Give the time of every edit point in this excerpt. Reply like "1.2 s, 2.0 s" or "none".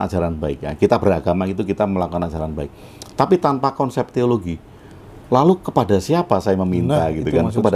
none